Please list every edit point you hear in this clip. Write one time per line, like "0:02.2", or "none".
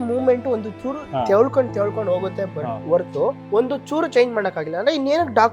0:01.0
0:03.0